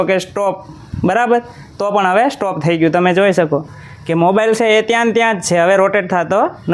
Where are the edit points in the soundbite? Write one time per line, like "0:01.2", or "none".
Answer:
none